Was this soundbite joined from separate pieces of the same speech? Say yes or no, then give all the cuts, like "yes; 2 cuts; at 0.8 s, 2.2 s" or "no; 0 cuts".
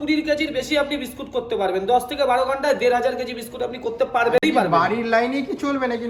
no; 0 cuts